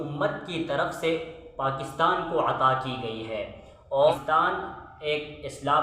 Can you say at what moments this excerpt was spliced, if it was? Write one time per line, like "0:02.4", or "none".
0:04.1